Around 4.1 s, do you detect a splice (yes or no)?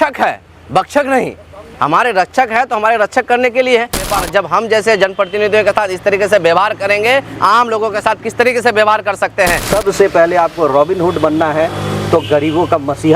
yes